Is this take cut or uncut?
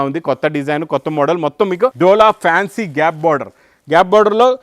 cut